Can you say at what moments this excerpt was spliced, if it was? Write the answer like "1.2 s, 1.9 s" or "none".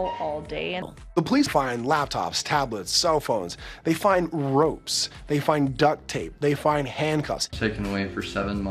0.8 s, 7.4 s